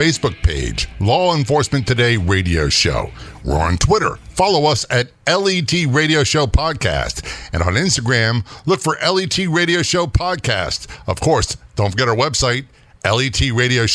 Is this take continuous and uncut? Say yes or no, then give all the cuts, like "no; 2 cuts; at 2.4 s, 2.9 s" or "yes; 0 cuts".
yes; 0 cuts